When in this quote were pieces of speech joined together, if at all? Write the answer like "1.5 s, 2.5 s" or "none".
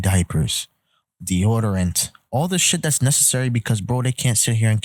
none